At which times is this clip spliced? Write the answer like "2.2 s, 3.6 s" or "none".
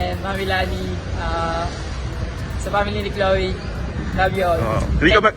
none

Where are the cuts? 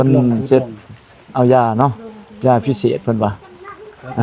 none

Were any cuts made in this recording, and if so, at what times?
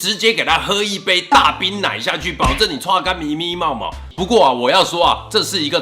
4.0 s

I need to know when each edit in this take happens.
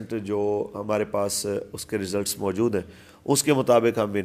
none

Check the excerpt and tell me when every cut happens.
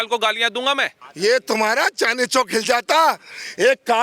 1.1 s

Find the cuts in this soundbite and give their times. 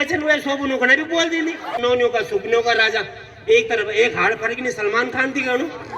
1.7 s

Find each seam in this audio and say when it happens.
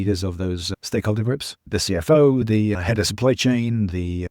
1.7 s

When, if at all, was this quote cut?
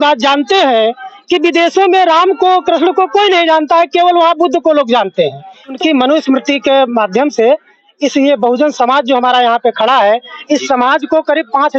5.8 s

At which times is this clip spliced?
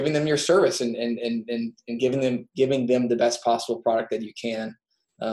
none

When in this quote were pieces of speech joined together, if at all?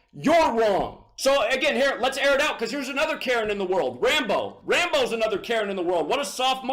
1.0 s

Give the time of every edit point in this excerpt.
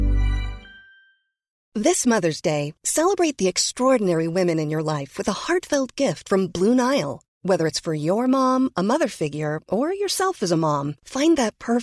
1.6 s

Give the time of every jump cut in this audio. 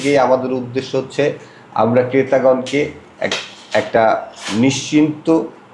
none

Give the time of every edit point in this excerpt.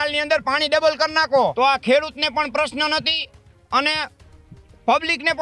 1.5 s

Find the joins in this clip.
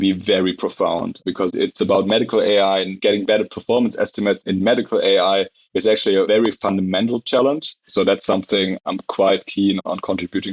1.4 s, 2.9 s, 6.3 s, 7.8 s

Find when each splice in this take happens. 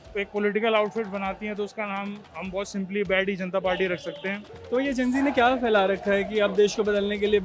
4.5 s

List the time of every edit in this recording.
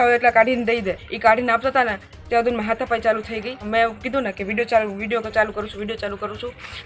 1.1 s, 3.7 s

